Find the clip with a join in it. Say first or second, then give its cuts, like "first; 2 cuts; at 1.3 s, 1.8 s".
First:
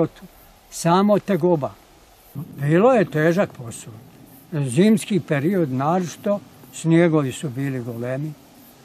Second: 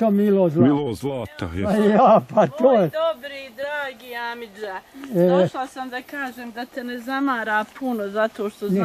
first; 1 cut; at 2.3 s